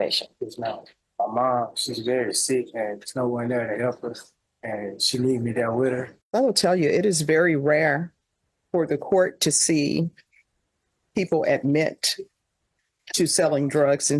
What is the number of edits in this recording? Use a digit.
2